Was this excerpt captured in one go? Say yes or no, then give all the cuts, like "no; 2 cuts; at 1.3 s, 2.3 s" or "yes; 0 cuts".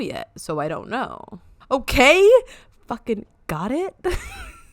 no; 1 cut; at 1.2 s